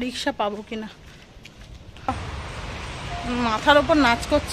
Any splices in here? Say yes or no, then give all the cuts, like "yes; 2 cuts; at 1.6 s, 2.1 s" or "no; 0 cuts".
yes; 1 cut; at 2.1 s